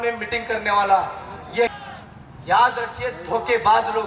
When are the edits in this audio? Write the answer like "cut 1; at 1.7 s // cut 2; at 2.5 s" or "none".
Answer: cut 1; at 1.7 s